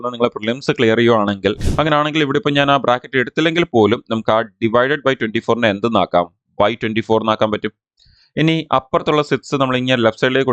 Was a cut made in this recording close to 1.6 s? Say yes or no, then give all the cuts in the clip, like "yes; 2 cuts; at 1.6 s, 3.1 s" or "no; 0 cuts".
yes; 1 cut; at 1.6 s